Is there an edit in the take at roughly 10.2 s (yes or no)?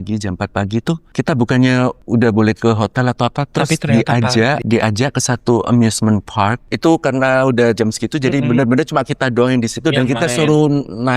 no